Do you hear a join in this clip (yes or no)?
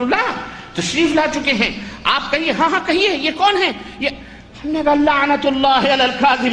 no